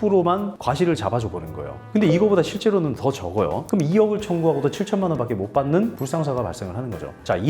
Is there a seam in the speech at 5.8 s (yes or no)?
no